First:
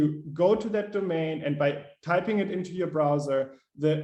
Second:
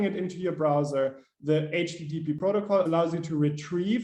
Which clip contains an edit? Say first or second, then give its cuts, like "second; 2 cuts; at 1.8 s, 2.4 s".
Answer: second; 1 cut; at 2.9 s